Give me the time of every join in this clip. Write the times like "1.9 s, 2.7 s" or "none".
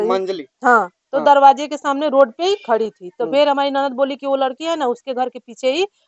none

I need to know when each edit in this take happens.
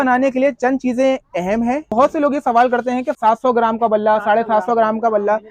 1.9 s, 3.1 s

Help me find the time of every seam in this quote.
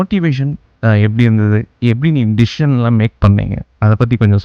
none

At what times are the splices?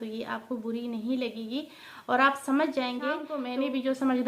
3.4 s

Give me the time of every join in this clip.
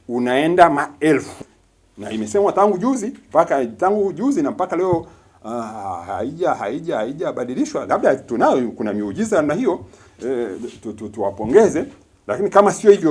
1.3 s

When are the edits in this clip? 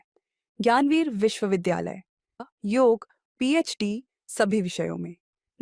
2.4 s

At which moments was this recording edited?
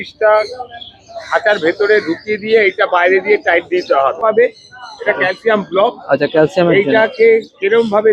4.2 s

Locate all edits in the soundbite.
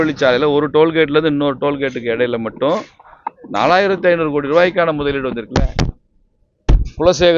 none

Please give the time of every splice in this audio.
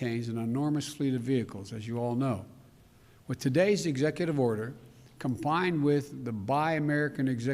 6.2 s

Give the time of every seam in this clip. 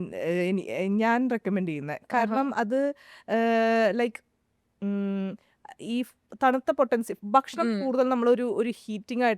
none

